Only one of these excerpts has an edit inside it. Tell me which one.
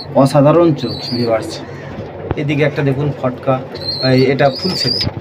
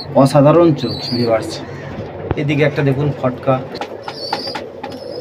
second; 1 cut; at 3.8 s

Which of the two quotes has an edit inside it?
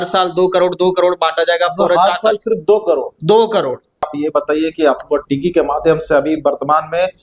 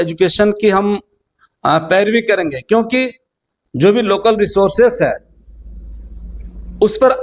first; 1 cut; at 4.1 s

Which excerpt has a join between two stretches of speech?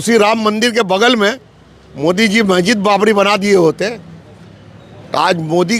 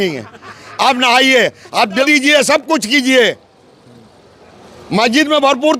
second; 1 cut; at 2.0 s

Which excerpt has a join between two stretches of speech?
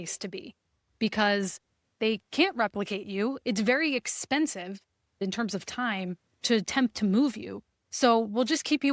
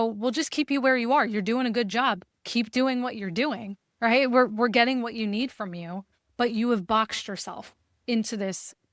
first; 1 cut; at 5.2 s

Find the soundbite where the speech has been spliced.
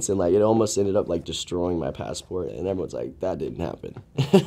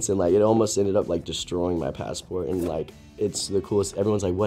first; 1 cut; at 2.5 s

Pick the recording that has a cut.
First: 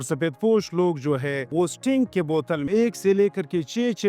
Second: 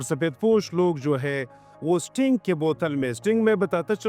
first; 2 cuts; at 1.4 s, 2.7 s

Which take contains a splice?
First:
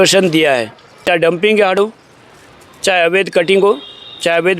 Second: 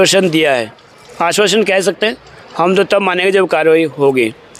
first; 1 cut; at 1.1 s

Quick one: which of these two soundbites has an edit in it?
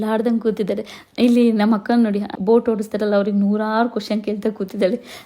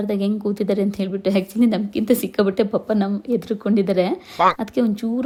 first; 2 cuts; at 1.0 s, 2.3 s

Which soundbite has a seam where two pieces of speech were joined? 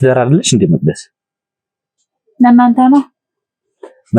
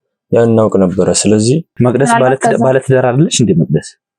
second; 1 cut; at 1.7 s

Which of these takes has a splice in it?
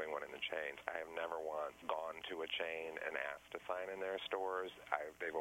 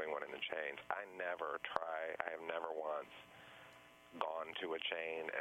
first; 2 cuts; at 0.8 s, 1.8 s

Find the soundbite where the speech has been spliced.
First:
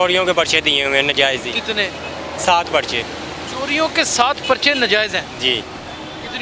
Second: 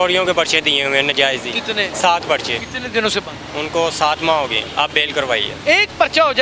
second; 5 cuts; at 1.9 s, 2.7 s, 3.4 s, 4.7 s, 5.6 s

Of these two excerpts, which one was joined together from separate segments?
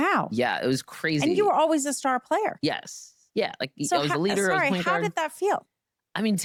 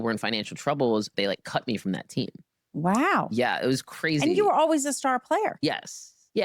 second; 1 cut; at 1.1 s

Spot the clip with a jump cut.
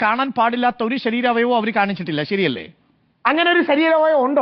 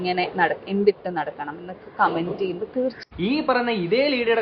second; 1 cut; at 3.0 s

